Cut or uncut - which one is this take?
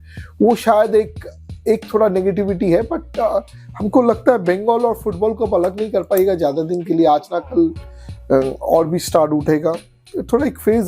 uncut